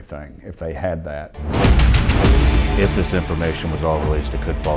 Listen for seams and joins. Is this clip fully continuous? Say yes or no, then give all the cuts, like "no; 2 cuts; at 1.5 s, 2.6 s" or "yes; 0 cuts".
no; 1 cut; at 1.3 s